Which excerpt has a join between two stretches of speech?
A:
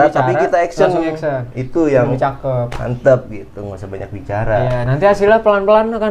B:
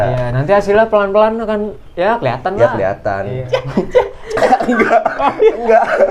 B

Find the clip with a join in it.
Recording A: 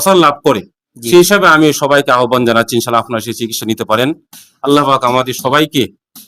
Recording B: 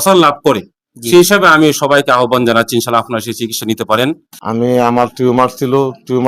B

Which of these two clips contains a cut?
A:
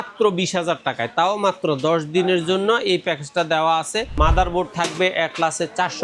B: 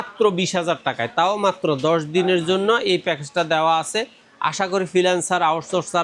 A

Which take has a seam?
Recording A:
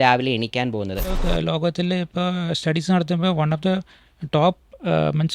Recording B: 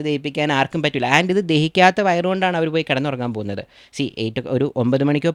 A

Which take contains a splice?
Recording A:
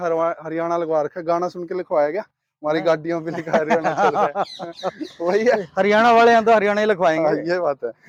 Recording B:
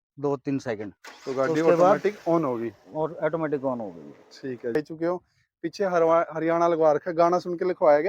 B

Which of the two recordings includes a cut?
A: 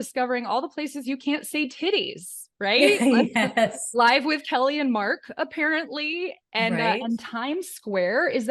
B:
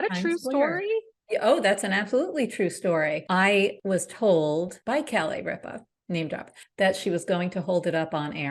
B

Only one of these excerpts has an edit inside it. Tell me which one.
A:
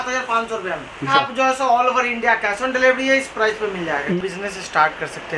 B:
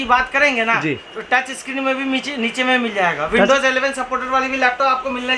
A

